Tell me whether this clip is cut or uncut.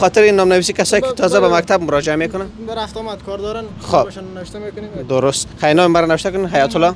uncut